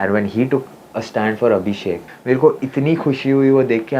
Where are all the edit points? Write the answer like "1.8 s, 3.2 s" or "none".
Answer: 2.1 s